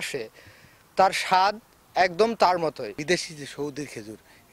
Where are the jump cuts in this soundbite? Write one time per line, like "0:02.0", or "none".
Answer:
0:02.9